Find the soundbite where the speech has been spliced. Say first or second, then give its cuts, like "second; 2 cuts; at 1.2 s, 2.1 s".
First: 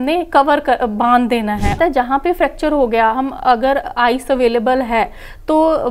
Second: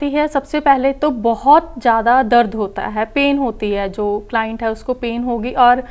first; 1 cut; at 1.8 s